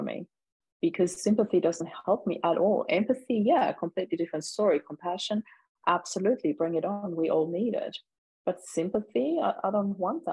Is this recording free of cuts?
yes; 0 cuts

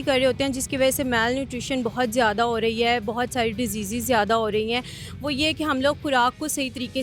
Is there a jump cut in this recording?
no; 0 cuts

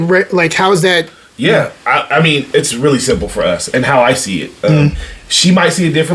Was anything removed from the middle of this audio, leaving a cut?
yes; 1 cut; at 1.2 s

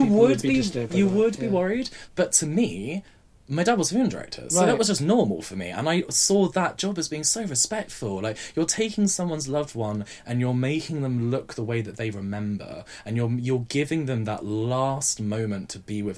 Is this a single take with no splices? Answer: no; 1 cut; at 2.0 s

